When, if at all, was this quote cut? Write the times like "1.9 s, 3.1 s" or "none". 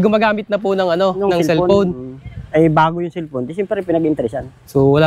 none